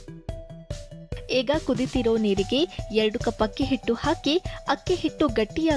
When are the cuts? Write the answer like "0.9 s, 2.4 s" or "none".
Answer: 1.2 s